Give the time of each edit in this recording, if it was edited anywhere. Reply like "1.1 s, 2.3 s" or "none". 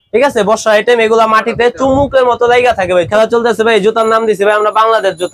3.1 s